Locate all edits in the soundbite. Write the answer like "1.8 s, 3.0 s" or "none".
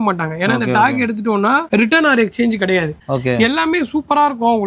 1.6 s, 3.0 s